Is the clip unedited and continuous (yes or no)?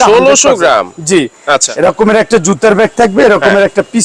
no